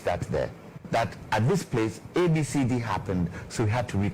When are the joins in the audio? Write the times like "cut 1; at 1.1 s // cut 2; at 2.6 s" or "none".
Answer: cut 1; at 1.2 s